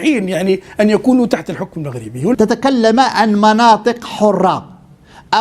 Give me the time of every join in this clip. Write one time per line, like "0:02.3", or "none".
0:02.3